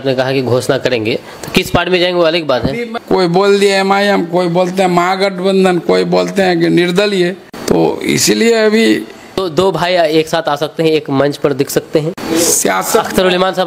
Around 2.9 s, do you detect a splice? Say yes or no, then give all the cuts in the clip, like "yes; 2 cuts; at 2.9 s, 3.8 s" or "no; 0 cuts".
yes; 4 cuts; at 2.9 s, 7.5 s, 9.4 s, 12.2 s